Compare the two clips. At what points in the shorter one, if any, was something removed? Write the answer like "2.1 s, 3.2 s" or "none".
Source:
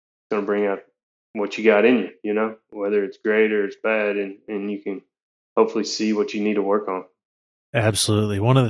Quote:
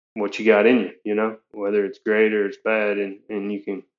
none